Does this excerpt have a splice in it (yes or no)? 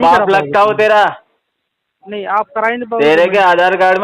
no